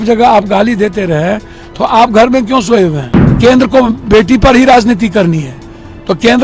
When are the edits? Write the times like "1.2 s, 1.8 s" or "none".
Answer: 3.4 s